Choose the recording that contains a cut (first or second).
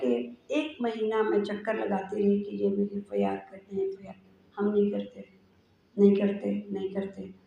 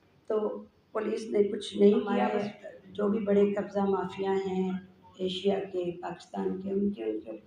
second